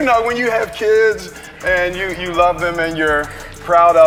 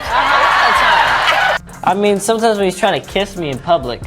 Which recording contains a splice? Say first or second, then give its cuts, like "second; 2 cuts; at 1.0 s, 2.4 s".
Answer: second; 1 cut; at 1.6 s